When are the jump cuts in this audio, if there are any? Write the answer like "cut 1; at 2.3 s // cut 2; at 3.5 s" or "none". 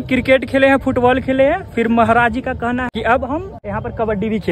cut 1; at 2.9 s // cut 2; at 3.6 s